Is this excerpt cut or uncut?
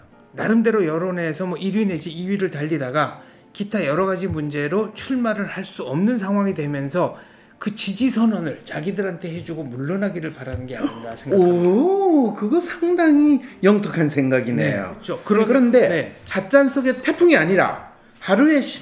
cut